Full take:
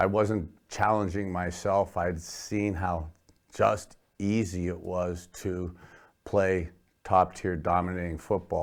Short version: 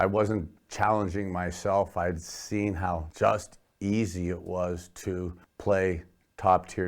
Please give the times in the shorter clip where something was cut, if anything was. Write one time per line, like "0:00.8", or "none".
0:03.1
0:05.4